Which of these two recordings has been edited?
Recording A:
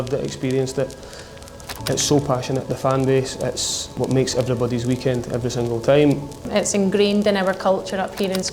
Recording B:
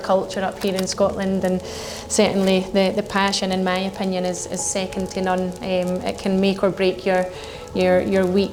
A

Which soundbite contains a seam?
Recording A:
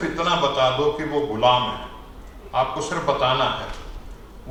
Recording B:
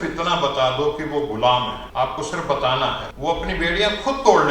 B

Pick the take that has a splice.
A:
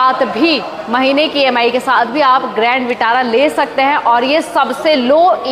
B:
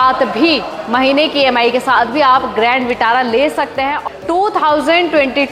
B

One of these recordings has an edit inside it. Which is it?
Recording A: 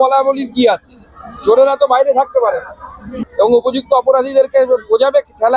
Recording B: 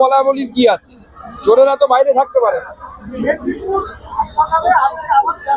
A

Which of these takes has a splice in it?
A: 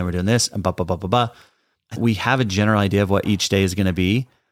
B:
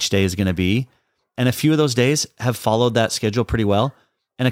A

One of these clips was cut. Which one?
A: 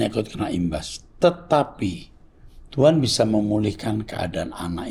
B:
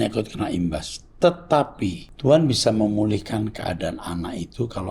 B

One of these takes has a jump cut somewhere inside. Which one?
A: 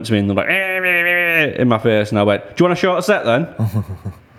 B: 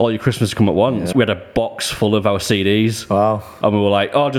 B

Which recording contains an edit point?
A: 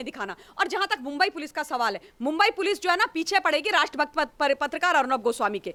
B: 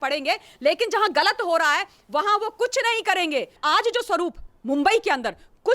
B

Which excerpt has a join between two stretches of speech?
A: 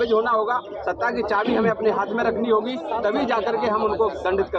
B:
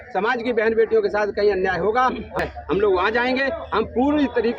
B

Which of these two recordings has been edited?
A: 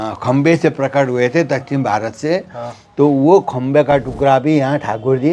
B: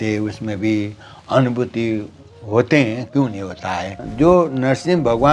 B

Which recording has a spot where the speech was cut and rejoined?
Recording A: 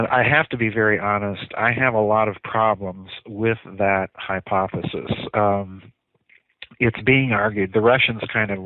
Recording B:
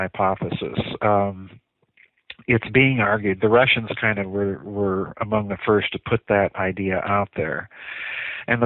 A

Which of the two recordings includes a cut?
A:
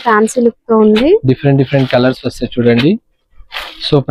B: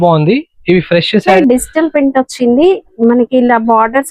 B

